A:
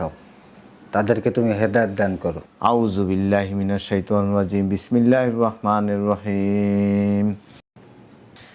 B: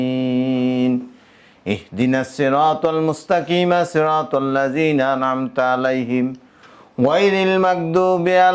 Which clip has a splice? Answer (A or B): A